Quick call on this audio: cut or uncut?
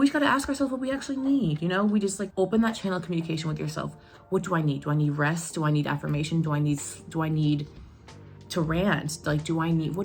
uncut